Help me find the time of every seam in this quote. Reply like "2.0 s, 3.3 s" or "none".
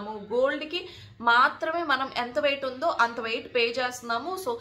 none